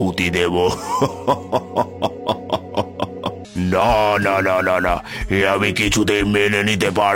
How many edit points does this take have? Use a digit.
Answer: 1